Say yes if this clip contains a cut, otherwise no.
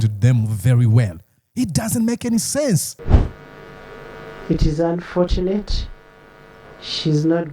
yes